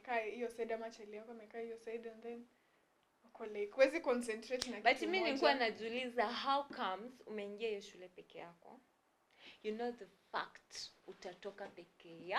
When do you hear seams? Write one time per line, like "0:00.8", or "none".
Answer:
none